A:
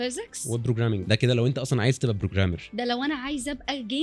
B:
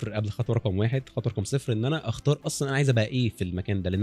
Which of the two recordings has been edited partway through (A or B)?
A